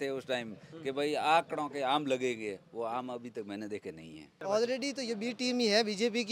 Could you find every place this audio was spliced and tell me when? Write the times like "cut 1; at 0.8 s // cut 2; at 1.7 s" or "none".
cut 1; at 4.3 s

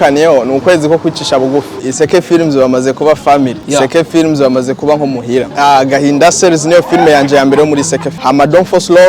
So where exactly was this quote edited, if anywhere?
cut 1; at 1.8 s // cut 2; at 3.6 s // cut 3; at 5.5 s // cut 4; at 8.1 s

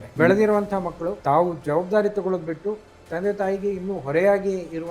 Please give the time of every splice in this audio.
cut 1; at 1.1 s

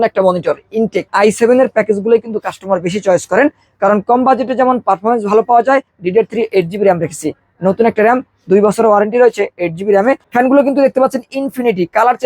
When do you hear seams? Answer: cut 1; at 1.1 s // cut 2; at 5.9 s // cut 3; at 10.2 s

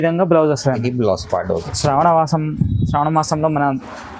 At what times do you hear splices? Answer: cut 1; at 1.6 s

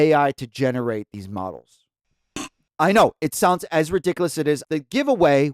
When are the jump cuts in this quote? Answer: cut 1; at 2.6 s // cut 2; at 4.6 s

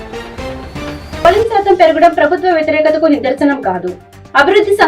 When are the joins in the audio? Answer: cut 1; at 1.2 s

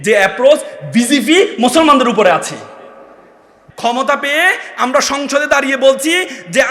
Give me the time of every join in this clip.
cut 1; at 3.6 s

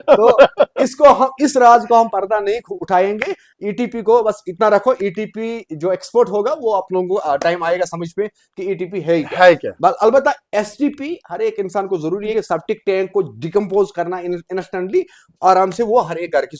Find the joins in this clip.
none

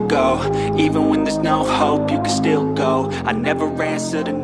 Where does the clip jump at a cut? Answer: none

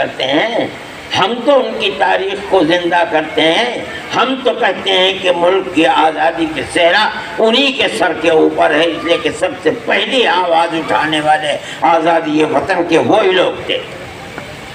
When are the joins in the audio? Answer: none

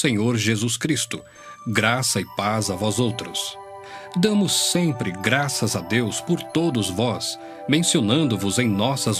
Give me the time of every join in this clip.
cut 1; at 2.3 s

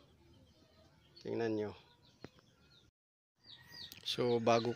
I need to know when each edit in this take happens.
cut 1; at 3.4 s

